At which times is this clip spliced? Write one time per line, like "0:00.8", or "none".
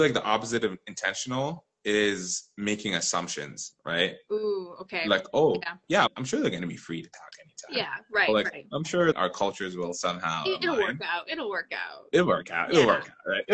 0:06.1
0:09.1